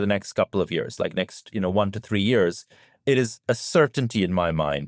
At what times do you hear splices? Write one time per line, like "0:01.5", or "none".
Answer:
none